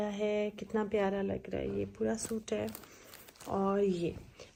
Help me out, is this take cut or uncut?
uncut